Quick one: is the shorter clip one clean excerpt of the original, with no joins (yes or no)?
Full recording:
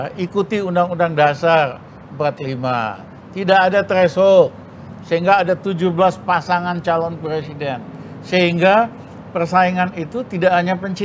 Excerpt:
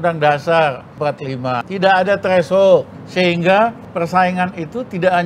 no